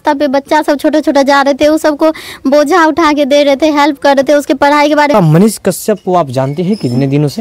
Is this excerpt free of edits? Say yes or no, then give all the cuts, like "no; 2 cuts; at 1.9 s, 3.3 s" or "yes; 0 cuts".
no; 1 cut; at 5.1 s